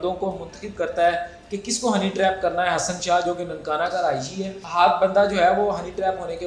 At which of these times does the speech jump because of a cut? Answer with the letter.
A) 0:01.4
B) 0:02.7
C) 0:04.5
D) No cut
C